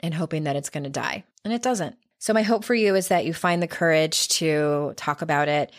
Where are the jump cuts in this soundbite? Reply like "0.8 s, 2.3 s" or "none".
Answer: 1.3 s, 2.1 s